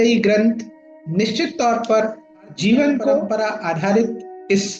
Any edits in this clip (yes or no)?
yes